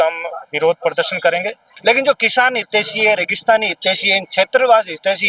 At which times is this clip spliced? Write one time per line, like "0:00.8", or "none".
0:01.6